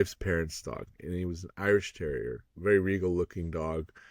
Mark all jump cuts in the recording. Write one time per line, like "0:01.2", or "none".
0:02.4